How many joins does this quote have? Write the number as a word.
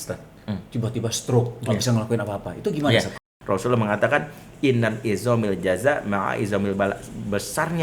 one